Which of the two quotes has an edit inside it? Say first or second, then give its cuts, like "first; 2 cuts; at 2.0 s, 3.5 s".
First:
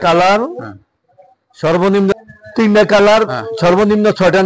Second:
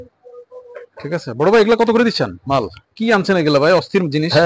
first; 1 cut; at 2.1 s